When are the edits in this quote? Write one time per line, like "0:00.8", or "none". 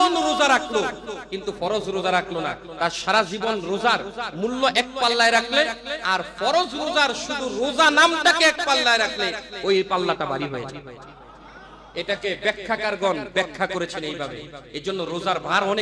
none